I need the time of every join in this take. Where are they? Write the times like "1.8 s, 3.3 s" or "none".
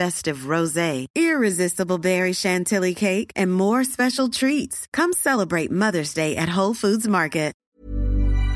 7.7 s